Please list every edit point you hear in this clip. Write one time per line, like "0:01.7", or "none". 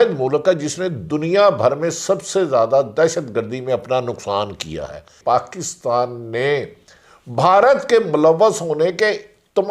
0:05.1

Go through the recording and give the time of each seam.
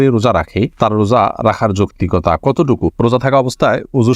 0:02.9

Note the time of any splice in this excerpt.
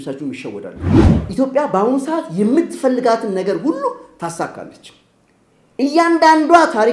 0:01.1

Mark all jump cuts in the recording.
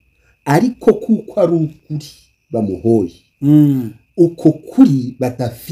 none

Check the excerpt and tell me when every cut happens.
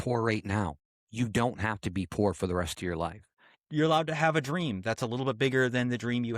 0:03.4

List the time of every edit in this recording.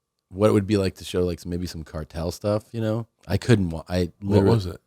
0:03.1

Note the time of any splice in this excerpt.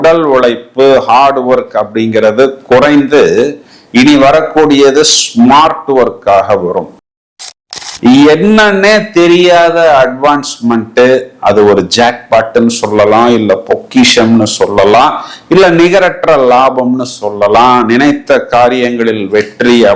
0:07.3

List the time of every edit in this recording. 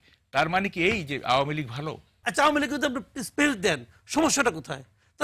0:02.2

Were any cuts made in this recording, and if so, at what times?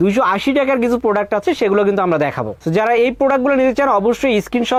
none

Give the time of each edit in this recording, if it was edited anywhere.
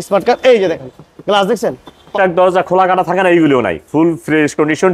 0:02.1

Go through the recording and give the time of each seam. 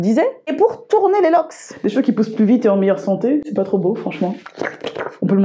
0:01.8
0:04.3

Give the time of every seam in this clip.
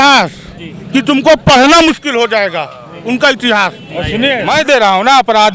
0:04.4

